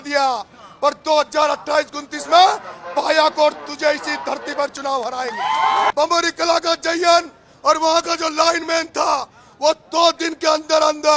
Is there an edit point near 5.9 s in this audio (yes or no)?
yes